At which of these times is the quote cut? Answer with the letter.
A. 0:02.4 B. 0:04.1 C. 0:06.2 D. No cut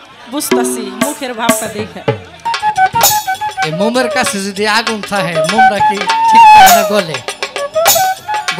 A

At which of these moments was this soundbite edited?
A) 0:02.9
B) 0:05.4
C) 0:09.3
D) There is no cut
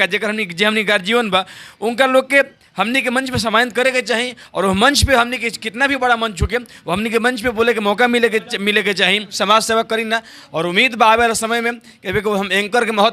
C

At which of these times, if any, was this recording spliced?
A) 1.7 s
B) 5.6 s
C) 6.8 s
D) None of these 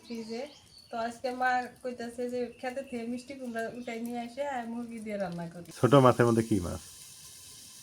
B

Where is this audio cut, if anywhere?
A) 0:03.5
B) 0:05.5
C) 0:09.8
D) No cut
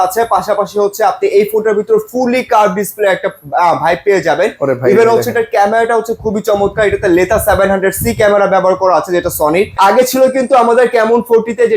C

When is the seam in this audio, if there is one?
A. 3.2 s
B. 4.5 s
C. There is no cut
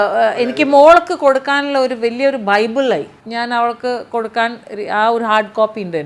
A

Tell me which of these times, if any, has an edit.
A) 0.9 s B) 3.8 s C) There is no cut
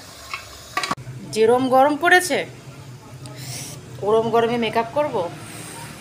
A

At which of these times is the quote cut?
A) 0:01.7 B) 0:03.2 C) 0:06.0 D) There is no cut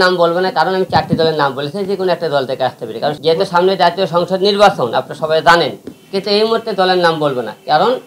B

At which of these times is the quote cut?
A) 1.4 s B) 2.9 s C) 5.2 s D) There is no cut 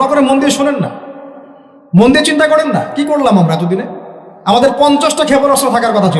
D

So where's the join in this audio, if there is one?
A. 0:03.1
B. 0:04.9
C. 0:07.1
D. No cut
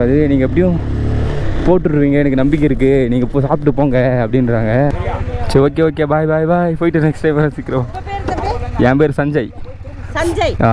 B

